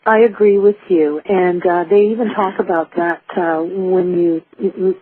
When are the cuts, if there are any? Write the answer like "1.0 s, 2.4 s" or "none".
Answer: 3.8 s

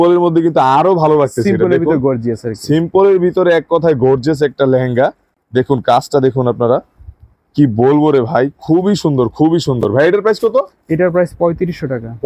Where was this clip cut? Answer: none

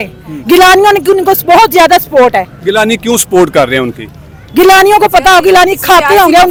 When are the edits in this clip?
none

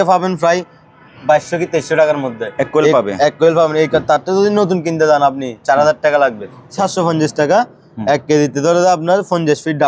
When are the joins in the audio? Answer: 6.8 s

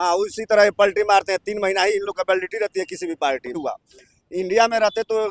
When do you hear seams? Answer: 3.6 s

